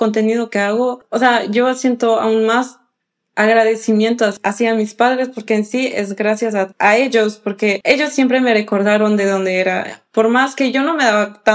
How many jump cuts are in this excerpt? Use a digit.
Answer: 4